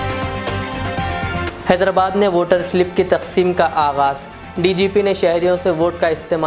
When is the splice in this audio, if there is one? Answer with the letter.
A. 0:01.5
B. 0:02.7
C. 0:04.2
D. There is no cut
A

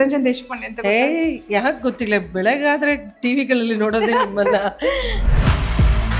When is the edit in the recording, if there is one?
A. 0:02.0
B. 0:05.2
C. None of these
B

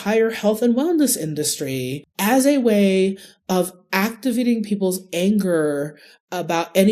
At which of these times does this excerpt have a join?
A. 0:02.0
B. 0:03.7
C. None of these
A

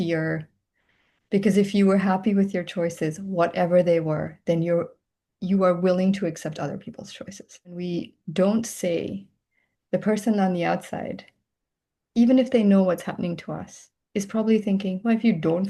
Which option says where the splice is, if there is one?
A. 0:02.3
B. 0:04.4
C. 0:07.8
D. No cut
C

